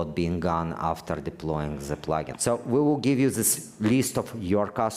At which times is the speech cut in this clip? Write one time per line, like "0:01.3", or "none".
0:02.3